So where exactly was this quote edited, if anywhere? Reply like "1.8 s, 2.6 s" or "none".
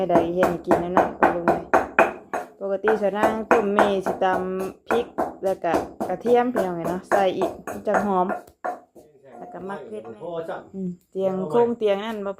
9.8 s